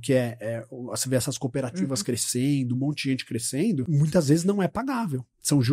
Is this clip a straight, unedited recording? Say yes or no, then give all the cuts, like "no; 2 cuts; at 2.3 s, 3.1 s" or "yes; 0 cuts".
no; 1 cut; at 3.9 s